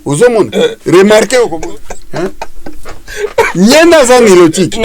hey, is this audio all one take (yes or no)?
no